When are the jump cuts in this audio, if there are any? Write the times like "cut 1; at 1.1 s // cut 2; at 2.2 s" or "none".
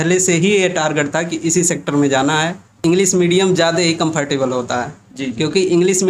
cut 1; at 2.7 s